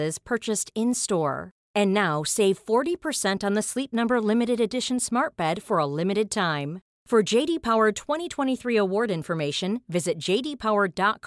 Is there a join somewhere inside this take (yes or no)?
no